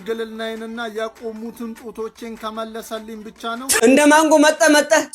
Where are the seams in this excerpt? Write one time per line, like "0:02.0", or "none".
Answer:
0:03.7